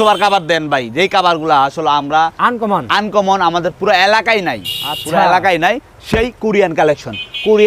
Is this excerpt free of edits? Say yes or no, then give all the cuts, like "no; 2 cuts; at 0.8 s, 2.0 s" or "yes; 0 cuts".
yes; 0 cuts